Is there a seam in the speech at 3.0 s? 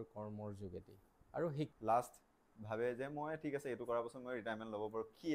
no; 1 cut; at 1.7 s

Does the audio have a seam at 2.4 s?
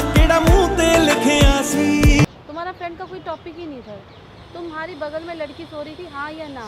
yes; 1 cut; at 2.4 s

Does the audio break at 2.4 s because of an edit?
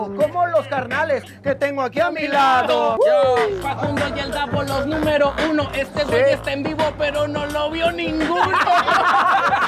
no; 1 cut; at 3.6 s

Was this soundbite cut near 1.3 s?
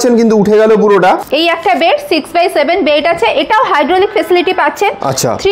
yes; 1 cut; at 1.3 s

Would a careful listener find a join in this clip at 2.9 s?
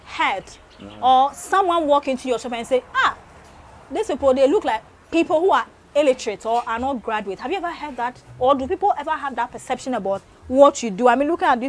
no; 1 cut; at 4.9 s

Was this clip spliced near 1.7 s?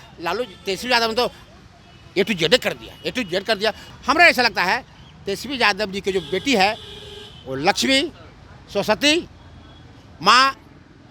no; 1 cut; at 3.9 s

